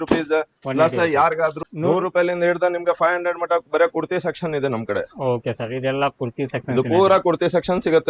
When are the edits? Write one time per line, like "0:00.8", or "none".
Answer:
0:01.6